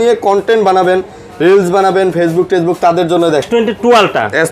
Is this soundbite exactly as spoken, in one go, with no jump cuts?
no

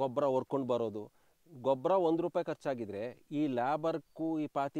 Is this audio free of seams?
yes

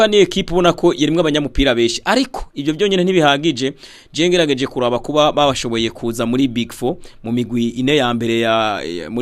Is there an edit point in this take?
no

